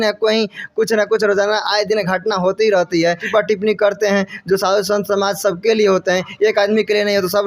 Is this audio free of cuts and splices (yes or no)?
no